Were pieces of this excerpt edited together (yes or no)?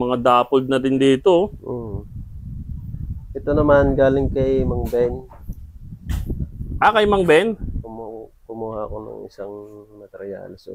no